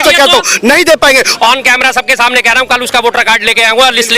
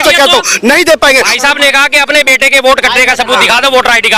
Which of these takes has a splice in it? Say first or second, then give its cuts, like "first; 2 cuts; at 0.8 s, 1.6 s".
first; 1 cut; at 1.3 s